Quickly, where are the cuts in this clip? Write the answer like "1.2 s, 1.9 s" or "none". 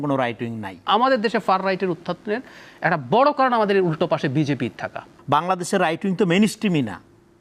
0.8 s, 5.1 s